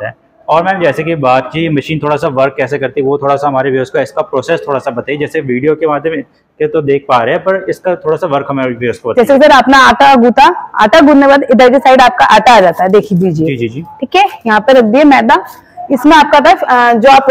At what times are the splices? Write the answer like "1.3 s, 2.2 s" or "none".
none

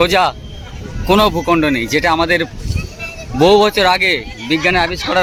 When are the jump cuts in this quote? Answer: none

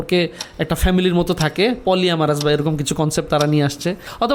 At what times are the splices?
none

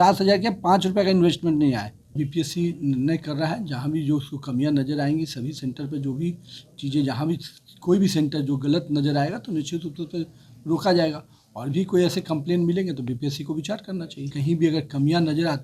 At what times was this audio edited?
2.2 s, 14.4 s

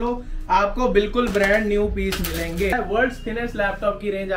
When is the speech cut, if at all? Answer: 2.8 s

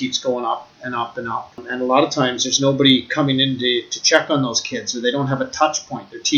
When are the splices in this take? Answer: 1.6 s

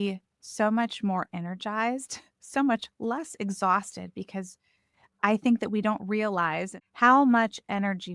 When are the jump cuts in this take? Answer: 6.7 s

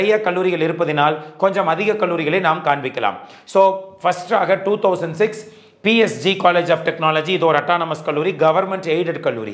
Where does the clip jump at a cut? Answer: none

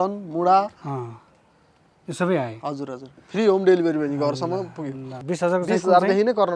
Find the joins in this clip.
5.1 s

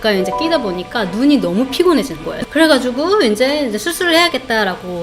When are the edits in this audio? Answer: 2.3 s

